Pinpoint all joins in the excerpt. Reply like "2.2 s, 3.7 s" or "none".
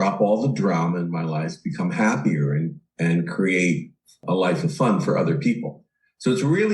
4.2 s